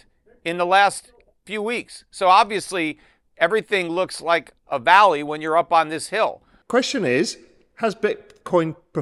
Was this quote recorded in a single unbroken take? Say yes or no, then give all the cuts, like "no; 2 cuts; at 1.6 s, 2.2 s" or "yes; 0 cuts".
yes; 0 cuts